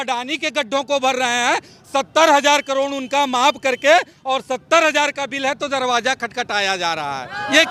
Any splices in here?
no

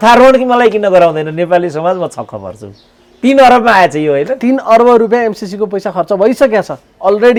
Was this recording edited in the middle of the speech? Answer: no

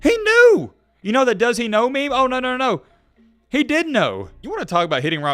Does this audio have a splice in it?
yes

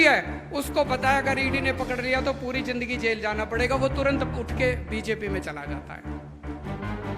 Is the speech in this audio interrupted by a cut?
no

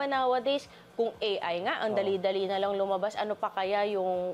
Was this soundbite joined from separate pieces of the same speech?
no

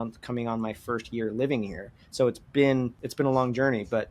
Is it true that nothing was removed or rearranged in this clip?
yes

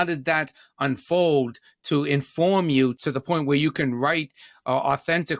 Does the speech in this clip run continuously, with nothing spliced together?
no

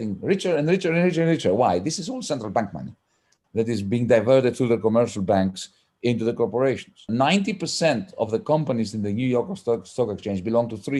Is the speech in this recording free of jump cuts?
no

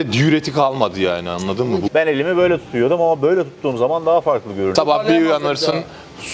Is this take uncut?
no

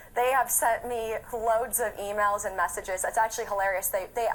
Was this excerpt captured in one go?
no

